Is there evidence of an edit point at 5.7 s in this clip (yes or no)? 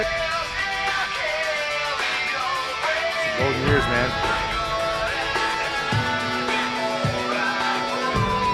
no